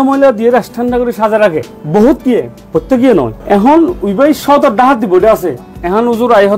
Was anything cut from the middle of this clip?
no; 0 cuts

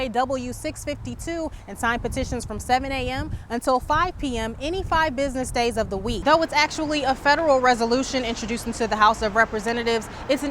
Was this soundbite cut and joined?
yes; 1 cut; at 6.2 s

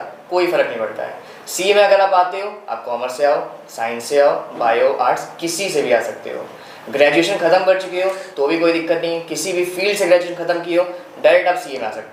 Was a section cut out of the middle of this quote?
no; 0 cuts

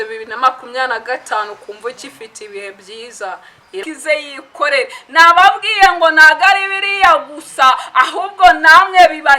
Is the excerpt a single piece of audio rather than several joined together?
no; 1 cut; at 3.8 s

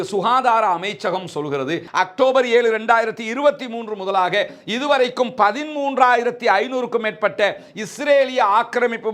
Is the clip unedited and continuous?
no; 1 cut; at 1.8 s

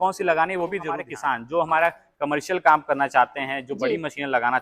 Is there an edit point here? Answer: yes; 1 cut; at 1.0 s

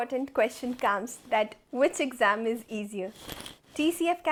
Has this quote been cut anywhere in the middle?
no; 0 cuts

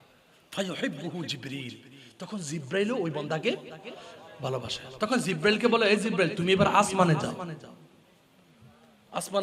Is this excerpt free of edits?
yes; 0 cuts

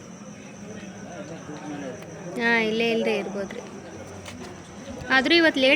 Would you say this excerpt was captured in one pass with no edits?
yes; 0 cuts

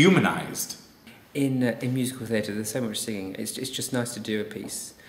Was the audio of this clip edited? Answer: yes; 1 cut; at 1.0 s

